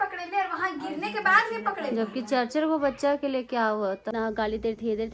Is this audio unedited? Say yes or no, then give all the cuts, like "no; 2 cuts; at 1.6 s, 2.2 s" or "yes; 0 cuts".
no; 1 cut; at 4.0 s